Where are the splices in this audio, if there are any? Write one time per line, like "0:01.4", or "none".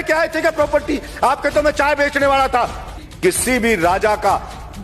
0:03.0